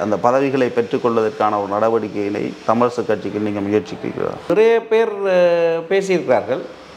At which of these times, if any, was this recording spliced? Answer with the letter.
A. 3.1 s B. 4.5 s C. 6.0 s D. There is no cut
B